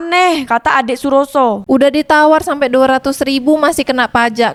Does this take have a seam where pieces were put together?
no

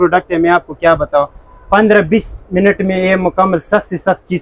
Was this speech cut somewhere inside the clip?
no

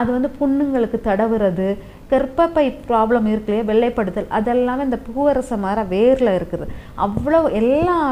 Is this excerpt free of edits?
yes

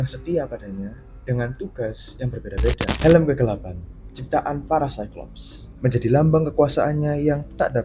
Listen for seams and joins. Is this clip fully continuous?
no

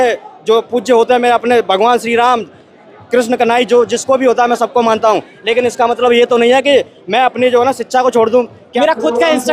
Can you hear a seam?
yes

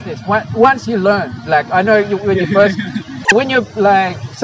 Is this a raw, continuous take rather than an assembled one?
yes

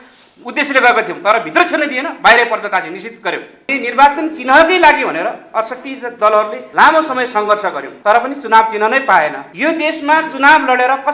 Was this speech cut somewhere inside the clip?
yes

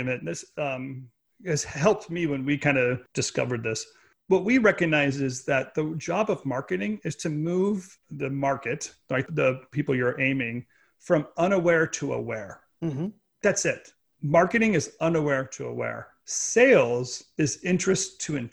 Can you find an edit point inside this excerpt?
yes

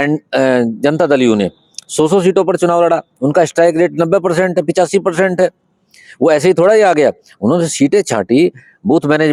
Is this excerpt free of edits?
yes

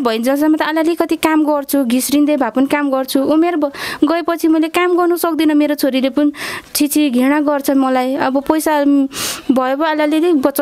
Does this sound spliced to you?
no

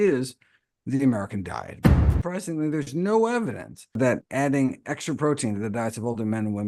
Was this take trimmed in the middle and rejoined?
yes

